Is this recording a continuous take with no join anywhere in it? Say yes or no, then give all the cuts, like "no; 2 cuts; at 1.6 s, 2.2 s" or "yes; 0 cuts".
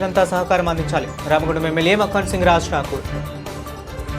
no; 1 cut; at 3.1 s